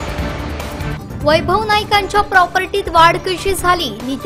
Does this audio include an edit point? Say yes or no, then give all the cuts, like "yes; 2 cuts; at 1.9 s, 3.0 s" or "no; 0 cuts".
no; 0 cuts